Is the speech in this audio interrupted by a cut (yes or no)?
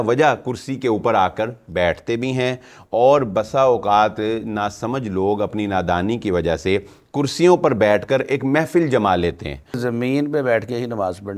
yes